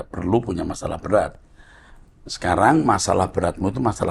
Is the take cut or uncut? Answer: uncut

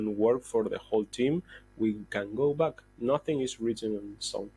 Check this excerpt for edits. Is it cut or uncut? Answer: uncut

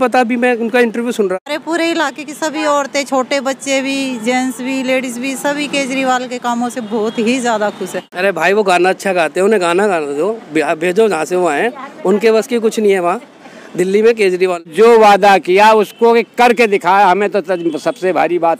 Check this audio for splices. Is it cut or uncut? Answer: cut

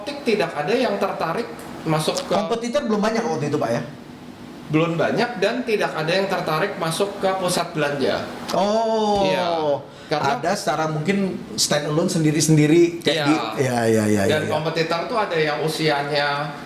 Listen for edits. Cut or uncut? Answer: uncut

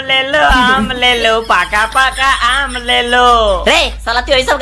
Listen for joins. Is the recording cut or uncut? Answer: uncut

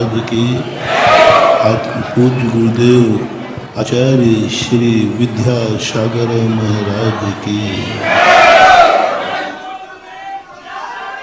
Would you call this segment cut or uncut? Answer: cut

